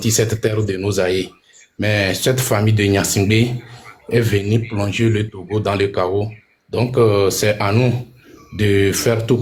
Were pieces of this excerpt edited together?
no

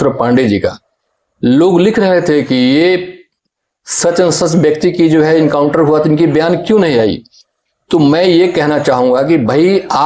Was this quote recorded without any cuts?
yes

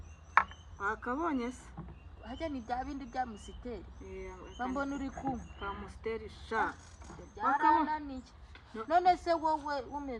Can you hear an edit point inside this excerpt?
no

